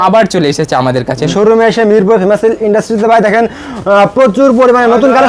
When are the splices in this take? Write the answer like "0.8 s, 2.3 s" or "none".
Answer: 1.3 s